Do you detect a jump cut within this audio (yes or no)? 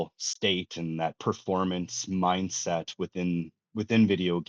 no